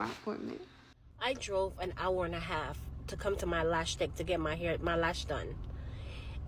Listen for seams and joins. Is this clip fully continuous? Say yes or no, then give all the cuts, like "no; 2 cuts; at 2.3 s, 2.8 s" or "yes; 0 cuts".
no; 1 cut; at 1.0 s